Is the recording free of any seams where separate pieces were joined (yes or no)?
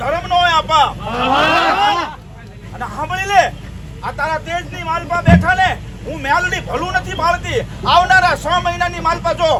yes